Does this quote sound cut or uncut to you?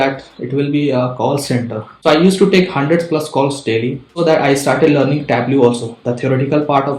cut